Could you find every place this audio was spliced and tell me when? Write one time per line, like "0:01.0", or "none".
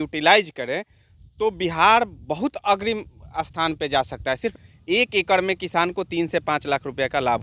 0:04.6